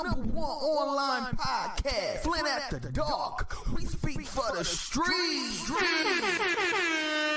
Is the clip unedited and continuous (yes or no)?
yes